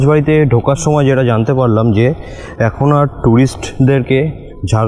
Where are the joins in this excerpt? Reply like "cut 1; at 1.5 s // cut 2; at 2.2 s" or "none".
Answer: none